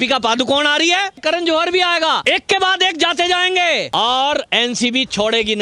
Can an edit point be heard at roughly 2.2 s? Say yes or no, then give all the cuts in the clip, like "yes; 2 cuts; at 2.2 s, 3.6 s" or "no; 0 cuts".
yes; 3 cuts; at 1.2 s, 2.2 s, 3.9 s